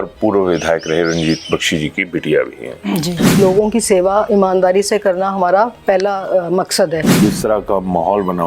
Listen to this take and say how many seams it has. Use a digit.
2